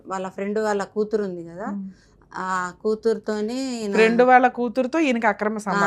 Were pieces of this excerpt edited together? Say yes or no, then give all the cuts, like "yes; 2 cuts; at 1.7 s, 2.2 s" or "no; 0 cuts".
no; 0 cuts